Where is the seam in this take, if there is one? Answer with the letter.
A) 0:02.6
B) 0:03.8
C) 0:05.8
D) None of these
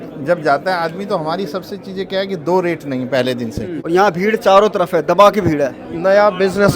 B